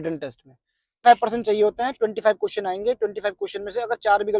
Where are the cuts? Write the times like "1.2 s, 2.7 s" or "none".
1.0 s